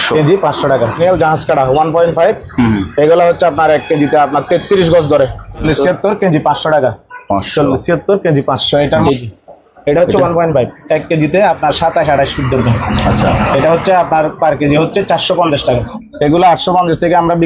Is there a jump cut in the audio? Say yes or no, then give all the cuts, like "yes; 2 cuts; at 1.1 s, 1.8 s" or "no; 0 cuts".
yes; 4 cuts; at 1.0 s, 5.6 s, 9.1 s, 16.0 s